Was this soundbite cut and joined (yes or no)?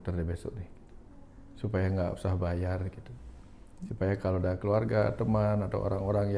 no